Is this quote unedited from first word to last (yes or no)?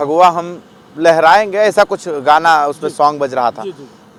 yes